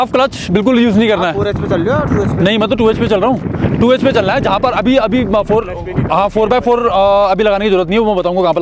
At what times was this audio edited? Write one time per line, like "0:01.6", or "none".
none